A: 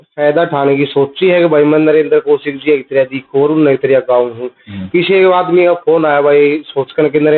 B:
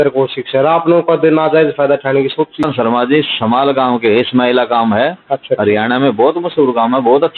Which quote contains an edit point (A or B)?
B